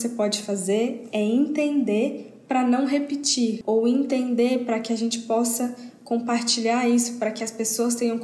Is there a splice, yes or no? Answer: yes